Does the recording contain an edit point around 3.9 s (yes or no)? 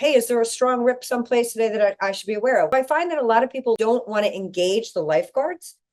no